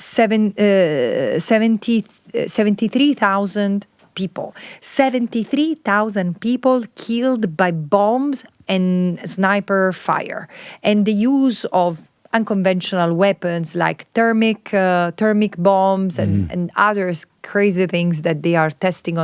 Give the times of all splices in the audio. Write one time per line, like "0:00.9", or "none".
none